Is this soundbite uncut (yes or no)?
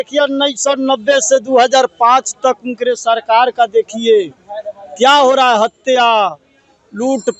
yes